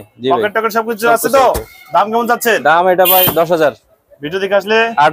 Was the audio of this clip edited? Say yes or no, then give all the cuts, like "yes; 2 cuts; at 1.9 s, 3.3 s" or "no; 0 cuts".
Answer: no; 0 cuts